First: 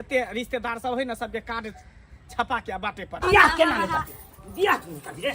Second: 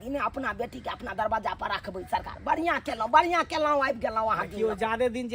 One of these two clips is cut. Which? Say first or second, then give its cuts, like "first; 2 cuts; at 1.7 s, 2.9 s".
first; 1 cut; at 3.2 s